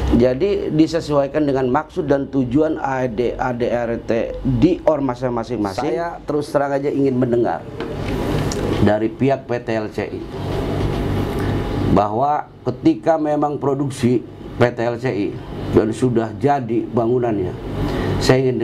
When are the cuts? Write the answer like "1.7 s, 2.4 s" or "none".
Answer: 6.1 s